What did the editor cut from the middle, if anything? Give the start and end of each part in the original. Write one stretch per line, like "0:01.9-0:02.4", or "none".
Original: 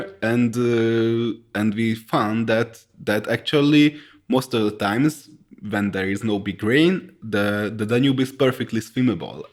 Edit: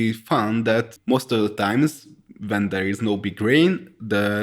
0:02.8-0:04.2